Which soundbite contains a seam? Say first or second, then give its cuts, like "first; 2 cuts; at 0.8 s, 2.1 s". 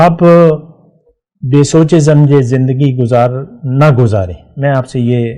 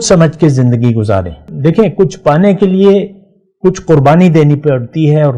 second; 1 cut; at 1.5 s